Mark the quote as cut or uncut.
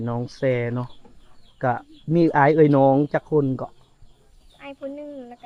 uncut